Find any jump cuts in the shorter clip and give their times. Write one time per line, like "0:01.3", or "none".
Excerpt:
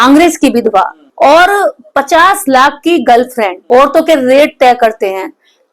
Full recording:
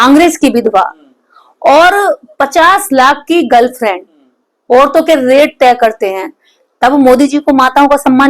0:01.0
0:03.6